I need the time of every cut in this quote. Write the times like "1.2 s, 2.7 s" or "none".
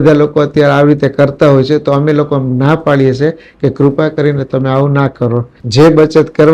5.6 s